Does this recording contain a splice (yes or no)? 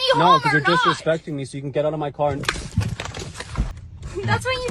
yes